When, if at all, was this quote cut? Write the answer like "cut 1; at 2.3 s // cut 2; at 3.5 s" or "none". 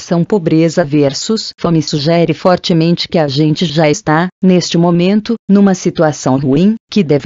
cut 1; at 6.2 s